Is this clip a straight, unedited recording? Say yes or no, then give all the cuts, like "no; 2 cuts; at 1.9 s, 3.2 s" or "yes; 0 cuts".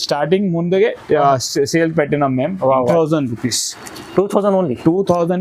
no; 1 cut; at 2.9 s